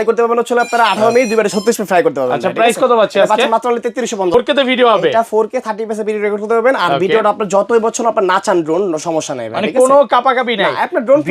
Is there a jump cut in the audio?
yes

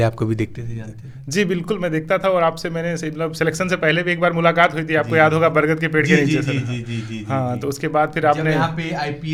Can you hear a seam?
no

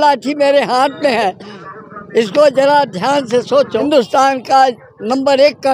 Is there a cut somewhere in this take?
yes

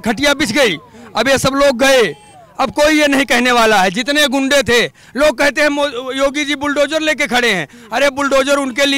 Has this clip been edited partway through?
no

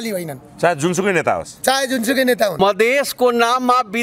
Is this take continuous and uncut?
no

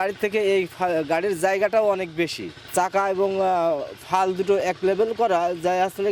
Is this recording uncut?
no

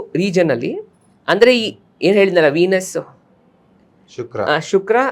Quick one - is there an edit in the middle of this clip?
no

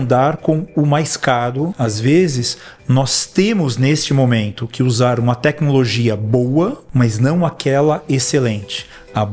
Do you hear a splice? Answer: yes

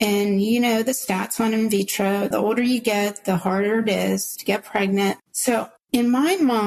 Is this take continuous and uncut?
yes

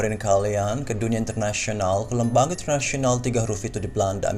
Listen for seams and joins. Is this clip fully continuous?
yes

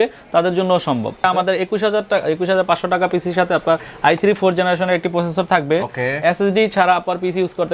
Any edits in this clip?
yes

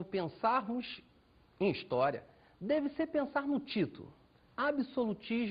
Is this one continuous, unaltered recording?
yes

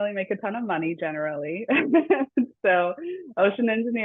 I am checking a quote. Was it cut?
no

